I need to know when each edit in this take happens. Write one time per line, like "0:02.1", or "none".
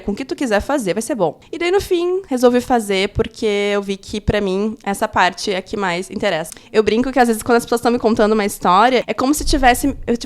0:01.4
0:02.2
0:06.6
0:09.0